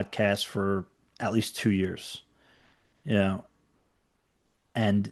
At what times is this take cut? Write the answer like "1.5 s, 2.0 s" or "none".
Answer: none